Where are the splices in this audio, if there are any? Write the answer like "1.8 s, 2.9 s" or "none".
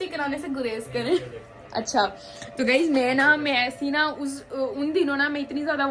none